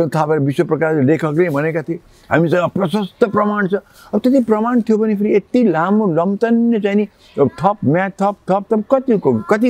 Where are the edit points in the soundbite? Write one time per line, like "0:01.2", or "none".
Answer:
none